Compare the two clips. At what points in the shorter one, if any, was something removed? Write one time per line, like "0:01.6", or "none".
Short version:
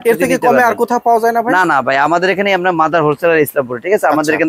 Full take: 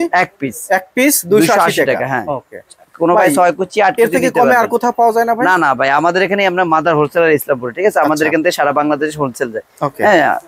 none